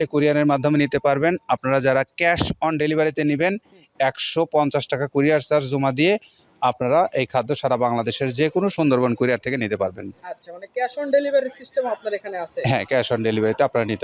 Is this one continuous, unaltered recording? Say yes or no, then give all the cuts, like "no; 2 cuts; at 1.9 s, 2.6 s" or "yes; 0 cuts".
yes; 0 cuts